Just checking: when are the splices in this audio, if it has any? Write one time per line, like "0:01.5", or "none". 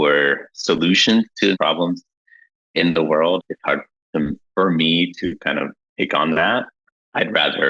0:01.5
0:03.4
0:06.8